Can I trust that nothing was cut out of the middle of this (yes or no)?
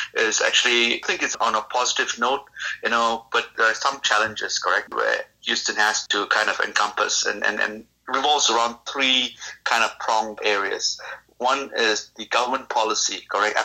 no